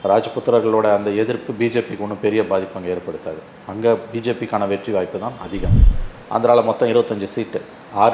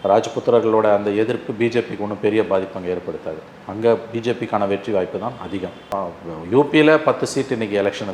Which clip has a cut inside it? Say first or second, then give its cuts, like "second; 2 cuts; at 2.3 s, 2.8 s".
first; 1 cut; at 5.8 s